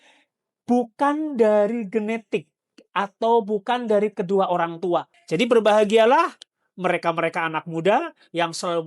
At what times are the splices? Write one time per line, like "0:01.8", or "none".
0:05.2